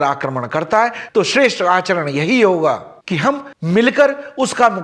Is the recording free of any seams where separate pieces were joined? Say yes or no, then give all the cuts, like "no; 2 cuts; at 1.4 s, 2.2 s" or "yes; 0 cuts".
yes; 0 cuts